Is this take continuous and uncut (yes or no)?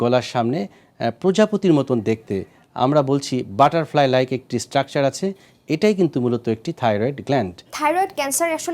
no